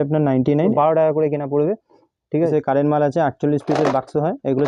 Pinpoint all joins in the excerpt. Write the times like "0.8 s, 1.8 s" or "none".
0.7 s, 2.5 s